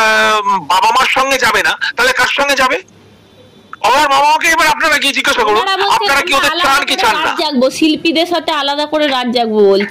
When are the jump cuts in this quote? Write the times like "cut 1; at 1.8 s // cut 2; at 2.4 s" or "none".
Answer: none